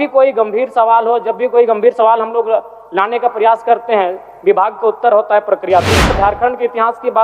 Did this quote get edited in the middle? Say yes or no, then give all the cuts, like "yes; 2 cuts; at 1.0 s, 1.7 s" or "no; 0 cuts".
yes; 1 cut; at 6.1 s